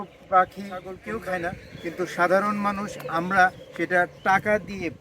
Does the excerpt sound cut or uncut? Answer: cut